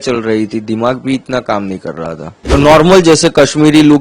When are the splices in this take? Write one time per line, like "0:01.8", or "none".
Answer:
0:02.5